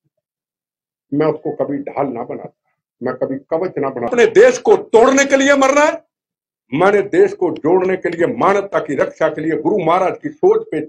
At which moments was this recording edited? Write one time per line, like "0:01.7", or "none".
0:04.1